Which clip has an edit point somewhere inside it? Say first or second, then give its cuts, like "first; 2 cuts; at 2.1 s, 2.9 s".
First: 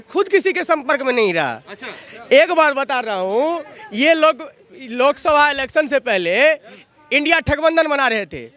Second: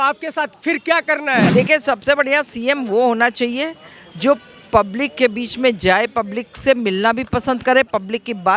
second; 1 cut; at 1.5 s